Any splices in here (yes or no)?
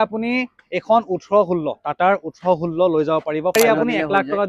yes